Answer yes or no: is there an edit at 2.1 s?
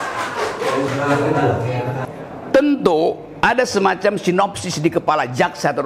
yes